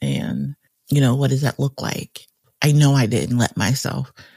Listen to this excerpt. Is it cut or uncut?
cut